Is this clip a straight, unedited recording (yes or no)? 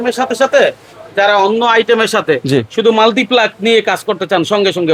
yes